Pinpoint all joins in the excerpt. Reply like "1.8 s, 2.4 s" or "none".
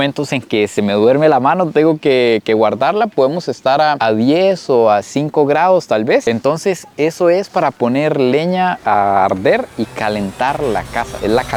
none

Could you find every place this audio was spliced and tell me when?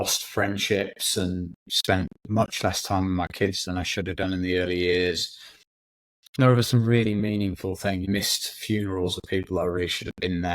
1.8 s, 8.1 s

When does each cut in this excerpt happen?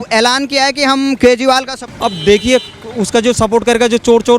1.8 s

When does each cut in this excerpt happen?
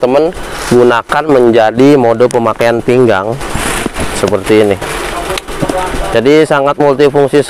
none

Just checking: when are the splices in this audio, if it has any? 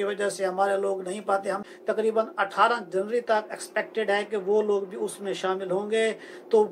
1.7 s

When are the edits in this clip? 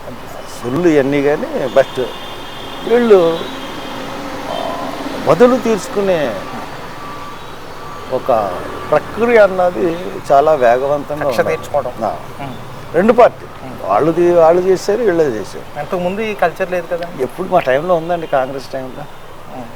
none

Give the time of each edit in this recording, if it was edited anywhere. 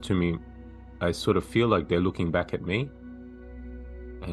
none

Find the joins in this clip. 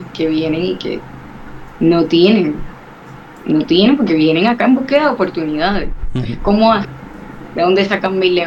none

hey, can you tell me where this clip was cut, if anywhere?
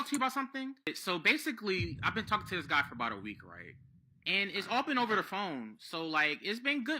0.9 s

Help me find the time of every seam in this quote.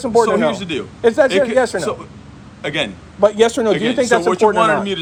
none

